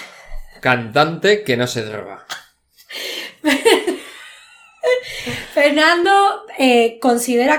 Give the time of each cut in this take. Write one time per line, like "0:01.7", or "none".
none